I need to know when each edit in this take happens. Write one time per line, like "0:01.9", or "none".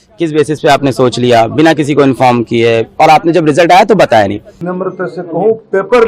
0:04.7